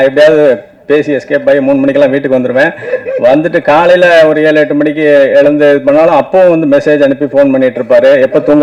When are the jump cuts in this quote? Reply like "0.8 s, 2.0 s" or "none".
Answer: none